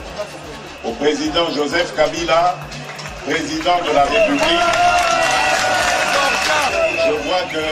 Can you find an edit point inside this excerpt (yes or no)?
yes